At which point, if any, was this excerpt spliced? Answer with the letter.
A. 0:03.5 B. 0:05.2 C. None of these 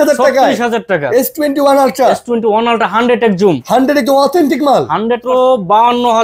B